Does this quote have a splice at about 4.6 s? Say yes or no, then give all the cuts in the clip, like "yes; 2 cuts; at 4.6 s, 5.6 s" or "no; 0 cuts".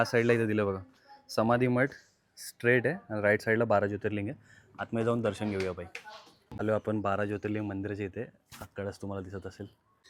no; 0 cuts